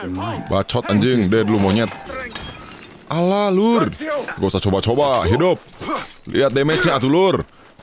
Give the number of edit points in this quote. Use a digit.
2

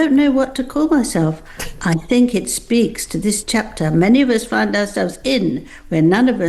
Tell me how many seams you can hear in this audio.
0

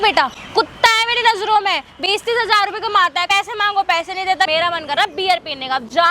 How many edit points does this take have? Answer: 2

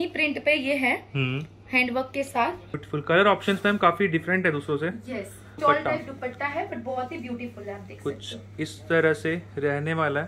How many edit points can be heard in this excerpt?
2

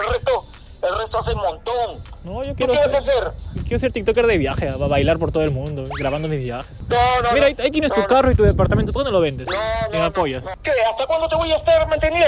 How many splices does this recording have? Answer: 1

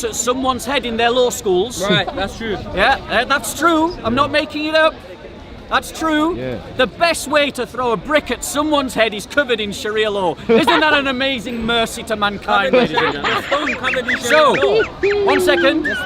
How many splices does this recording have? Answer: 0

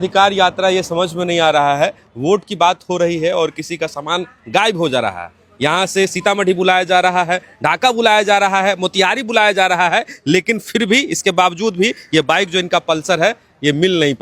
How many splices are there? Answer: 0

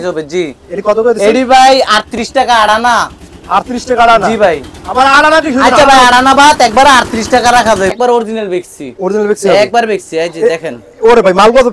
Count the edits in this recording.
1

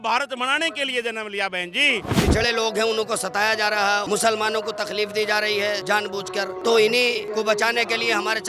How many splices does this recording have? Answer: 4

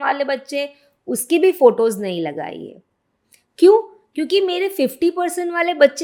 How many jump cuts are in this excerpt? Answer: 0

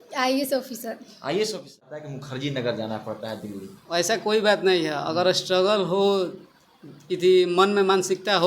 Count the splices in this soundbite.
1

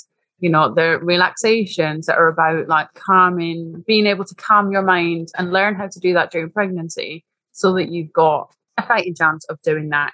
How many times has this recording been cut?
1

